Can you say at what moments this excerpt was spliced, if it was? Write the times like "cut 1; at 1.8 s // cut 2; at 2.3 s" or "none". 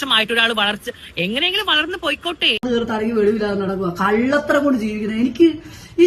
cut 1; at 2.6 s